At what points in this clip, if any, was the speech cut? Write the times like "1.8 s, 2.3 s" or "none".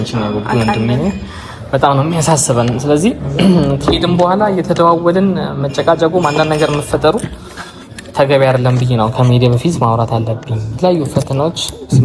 10.7 s